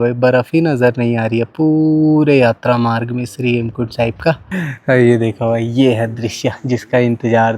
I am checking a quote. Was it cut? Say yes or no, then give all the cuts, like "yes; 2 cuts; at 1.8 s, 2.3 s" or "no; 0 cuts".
yes; 1 cut; at 4.5 s